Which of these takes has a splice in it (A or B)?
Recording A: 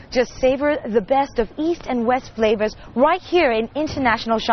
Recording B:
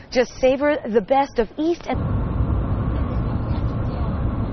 A